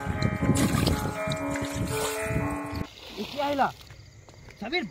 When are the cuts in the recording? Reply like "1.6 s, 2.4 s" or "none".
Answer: none